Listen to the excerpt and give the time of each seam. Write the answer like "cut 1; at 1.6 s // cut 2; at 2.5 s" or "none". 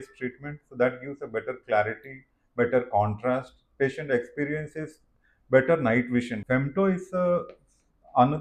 cut 1; at 6.4 s